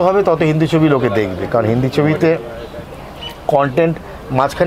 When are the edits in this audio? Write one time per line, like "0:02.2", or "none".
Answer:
none